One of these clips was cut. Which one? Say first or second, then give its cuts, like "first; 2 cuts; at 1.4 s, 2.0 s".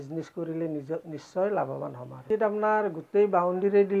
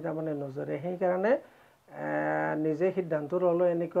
first; 1 cut; at 2.2 s